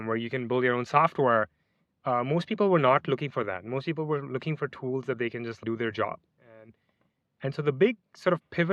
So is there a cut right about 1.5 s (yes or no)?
no